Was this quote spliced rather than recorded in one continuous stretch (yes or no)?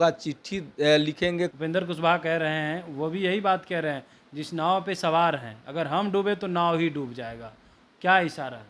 yes